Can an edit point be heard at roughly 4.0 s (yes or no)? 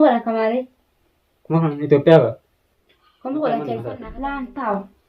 yes